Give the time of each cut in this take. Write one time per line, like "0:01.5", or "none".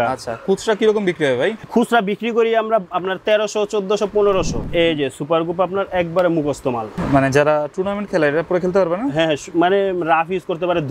0:01.6
0:04.7
0:07.0